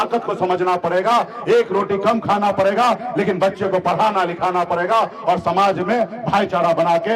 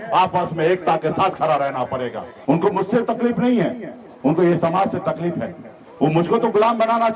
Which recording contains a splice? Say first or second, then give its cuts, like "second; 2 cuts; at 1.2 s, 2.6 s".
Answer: second; 1 cut; at 2.3 s